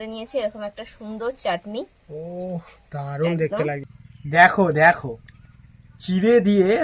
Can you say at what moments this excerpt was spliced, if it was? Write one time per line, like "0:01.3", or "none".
0:03.9

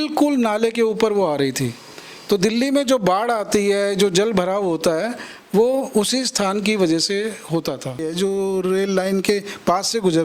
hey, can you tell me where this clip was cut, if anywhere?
0:08.1

